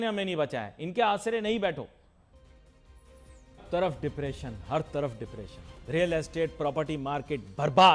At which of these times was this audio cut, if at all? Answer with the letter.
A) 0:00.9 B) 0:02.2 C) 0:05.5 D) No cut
B